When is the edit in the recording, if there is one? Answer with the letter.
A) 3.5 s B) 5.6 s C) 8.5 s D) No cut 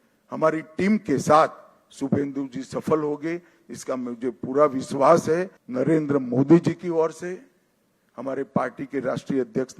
B